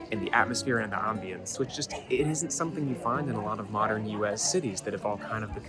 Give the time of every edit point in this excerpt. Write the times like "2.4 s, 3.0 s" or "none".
1.5 s